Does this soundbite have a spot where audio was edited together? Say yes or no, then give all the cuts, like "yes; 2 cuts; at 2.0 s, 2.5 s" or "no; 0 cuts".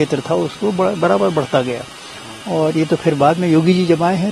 no; 0 cuts